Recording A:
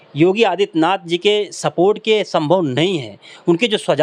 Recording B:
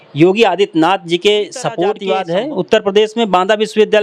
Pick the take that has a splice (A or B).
B